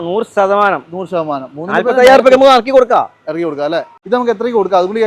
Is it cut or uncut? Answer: cut